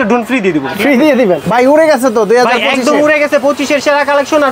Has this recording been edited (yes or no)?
yes